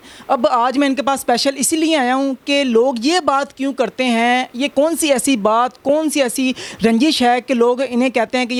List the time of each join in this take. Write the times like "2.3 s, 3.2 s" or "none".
none